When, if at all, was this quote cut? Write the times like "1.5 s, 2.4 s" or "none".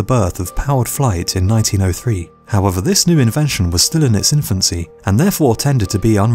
1.0 s